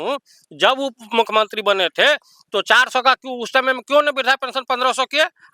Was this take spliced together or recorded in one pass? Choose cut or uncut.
uncut